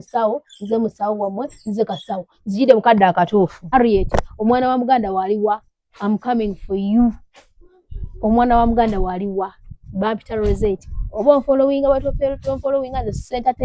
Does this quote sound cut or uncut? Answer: cut